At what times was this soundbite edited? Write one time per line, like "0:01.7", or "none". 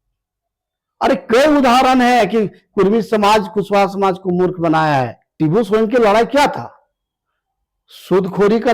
0:05.2